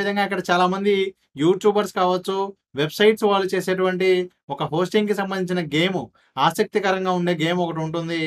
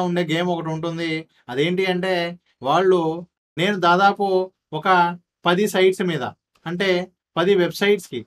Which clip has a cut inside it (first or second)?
second